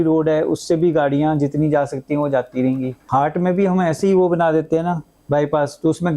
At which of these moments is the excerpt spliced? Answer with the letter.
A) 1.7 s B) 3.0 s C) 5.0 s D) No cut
B